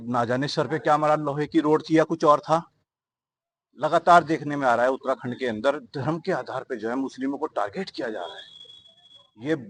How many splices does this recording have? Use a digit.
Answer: 0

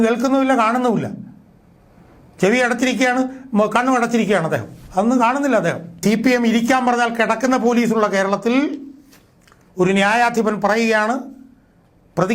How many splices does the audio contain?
1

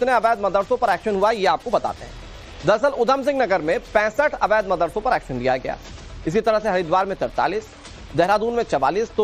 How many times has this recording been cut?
0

